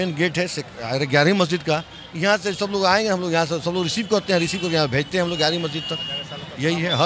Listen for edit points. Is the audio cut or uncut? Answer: uncut